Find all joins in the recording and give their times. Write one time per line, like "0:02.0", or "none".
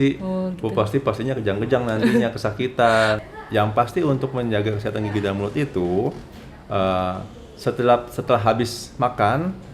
0:03.2